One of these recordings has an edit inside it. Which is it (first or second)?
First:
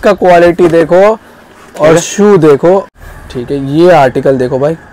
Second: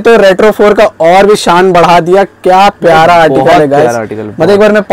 first